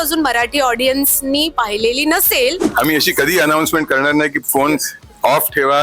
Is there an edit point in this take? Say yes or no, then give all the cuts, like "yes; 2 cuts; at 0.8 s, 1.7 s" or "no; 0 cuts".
yes; 1 cut; at 2.6 s